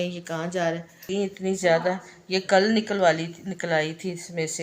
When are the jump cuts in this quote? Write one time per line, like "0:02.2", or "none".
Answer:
0:01.1